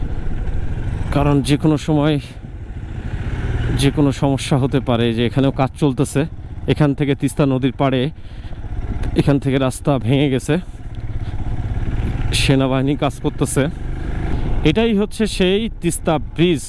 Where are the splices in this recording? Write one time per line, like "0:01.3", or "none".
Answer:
0:14.3